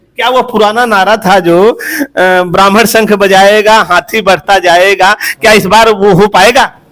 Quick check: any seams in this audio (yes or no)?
no